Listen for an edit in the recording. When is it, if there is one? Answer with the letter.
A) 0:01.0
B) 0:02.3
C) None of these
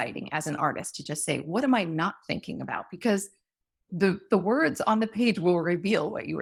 C